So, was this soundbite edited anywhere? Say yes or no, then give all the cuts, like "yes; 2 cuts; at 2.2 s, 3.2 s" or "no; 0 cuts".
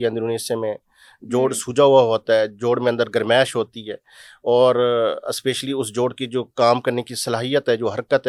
no; 0 cuts